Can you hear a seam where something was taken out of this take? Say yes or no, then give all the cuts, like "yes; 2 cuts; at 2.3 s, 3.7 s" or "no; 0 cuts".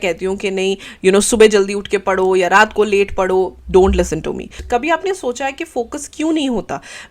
yes; 1 cut; at 4.5 s